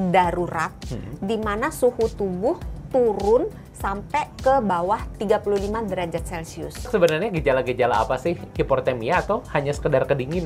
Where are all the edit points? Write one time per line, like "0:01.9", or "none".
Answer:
0:06.9
0:08.5